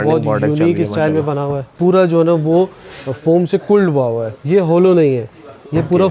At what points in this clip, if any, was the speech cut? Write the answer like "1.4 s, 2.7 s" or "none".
1.7 s, 4.3 s